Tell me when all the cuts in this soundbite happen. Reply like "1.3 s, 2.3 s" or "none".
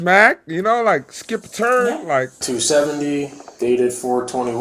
2.4 s